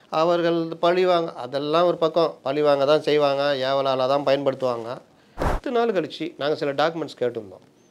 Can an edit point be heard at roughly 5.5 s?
yes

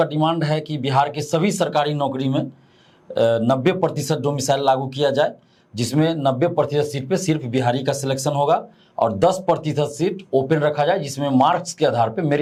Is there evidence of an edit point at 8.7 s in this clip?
no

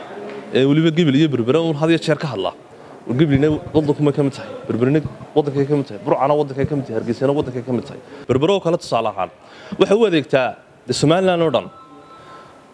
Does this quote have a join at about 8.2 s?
yes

